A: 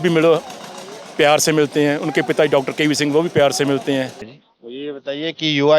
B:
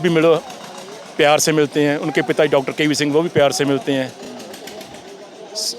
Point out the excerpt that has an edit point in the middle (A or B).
A